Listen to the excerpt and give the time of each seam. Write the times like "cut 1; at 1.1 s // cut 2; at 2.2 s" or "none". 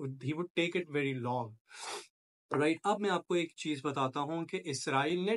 none